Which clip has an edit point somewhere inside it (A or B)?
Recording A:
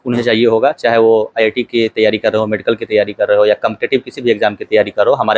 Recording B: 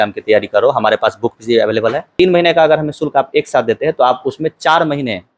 B